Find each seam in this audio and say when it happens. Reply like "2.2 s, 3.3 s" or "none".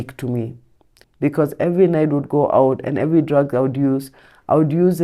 1.0 s